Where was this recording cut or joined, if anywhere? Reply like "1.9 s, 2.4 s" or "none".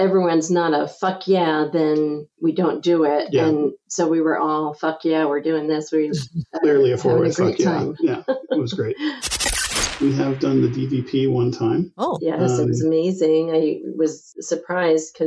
9.8 s